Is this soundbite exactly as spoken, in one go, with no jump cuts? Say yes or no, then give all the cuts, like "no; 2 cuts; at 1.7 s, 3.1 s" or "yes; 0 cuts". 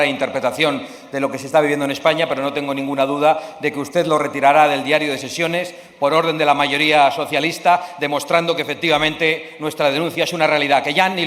yes; 0 cuts